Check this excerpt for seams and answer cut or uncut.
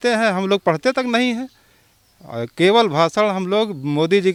uncut